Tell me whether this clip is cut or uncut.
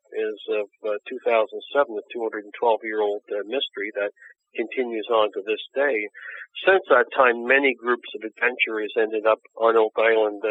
uncut